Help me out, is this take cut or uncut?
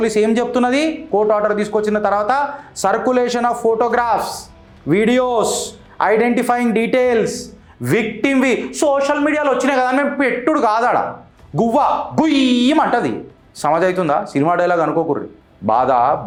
uncut